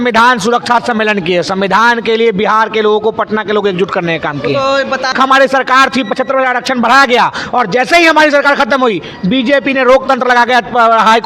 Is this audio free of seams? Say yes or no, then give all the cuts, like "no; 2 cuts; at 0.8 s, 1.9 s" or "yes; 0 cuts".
no; 1 cut; at 5.1 s